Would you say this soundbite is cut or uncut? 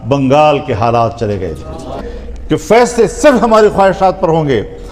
cut